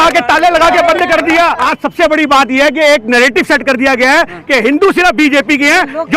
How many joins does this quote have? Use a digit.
1